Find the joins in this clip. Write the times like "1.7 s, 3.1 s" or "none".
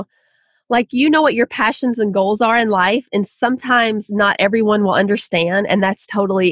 none